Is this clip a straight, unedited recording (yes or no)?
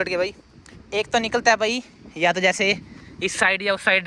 yes